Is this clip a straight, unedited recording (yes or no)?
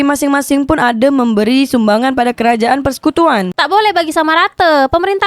no